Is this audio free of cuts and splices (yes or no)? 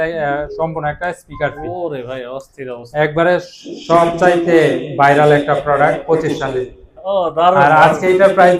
yes